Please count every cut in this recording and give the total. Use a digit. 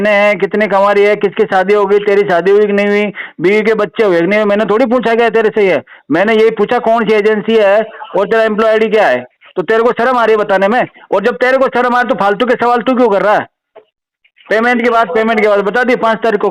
0